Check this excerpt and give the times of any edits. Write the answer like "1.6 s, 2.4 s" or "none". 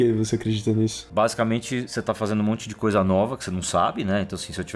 1.0 s, 1.9 s